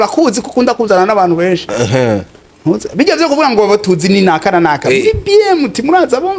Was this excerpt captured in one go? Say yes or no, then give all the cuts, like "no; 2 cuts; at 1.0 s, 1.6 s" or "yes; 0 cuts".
yes; 0 cuts